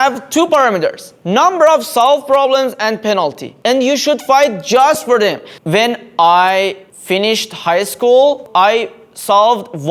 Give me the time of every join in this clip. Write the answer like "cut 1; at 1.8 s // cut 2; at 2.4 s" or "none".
cut 1; at 5.5 s // cut 2; at 6.9 s // cut 3; at 8.4 s